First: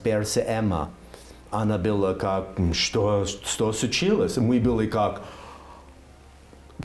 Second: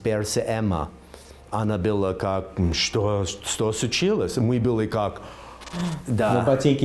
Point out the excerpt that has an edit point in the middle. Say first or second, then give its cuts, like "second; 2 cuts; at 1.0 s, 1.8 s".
second; 1 cut; at 5.7 s